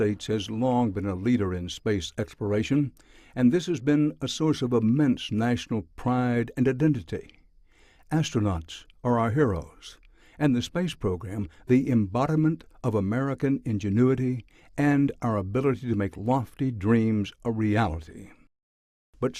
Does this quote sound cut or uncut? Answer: uncut